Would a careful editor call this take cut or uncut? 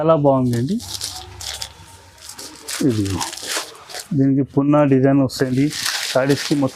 uncut